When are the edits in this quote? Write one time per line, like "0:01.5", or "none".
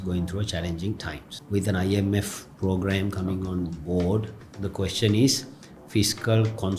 0:01.3
0:04.4